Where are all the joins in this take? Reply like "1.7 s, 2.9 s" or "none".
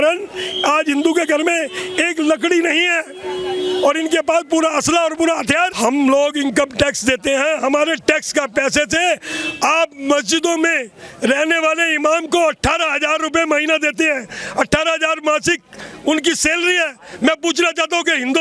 5.7 s